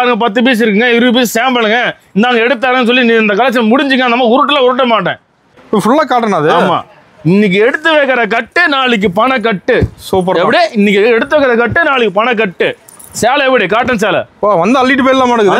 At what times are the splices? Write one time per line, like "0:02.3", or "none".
0:05.6